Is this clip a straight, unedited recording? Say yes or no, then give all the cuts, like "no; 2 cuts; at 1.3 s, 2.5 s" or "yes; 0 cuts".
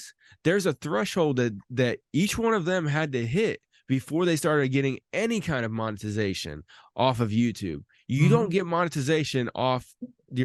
yes; 0 cuts